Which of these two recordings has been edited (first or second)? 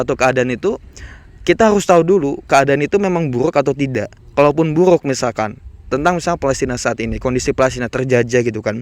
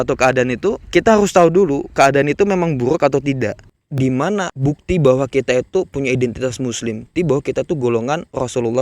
second